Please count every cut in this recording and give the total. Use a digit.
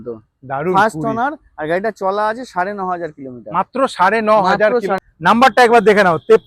1